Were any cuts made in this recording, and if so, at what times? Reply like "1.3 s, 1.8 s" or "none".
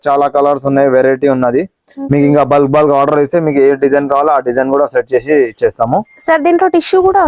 none